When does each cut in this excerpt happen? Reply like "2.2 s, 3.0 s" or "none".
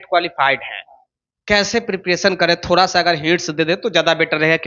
none